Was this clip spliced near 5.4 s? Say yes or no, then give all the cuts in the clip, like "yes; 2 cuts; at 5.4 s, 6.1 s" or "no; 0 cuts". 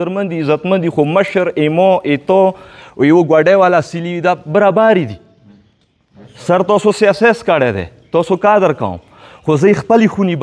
no; 0 cuts